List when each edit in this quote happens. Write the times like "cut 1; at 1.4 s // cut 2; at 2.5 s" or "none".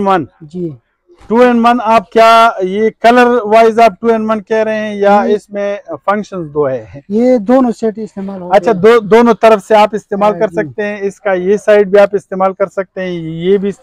none